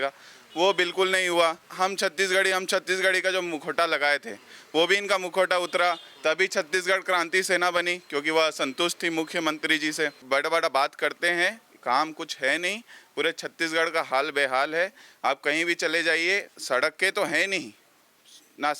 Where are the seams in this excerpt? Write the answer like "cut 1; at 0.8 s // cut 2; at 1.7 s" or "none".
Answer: cut 1; at 1.7 s // cut 2; at 10.2 s // cut 3; at 16.5 s